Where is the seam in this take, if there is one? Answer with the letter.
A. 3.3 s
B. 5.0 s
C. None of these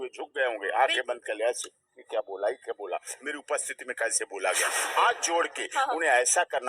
B